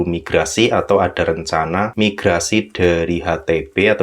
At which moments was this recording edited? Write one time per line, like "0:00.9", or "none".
0:01.9